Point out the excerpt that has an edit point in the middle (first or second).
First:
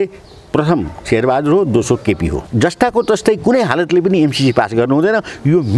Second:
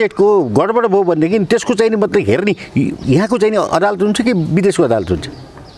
first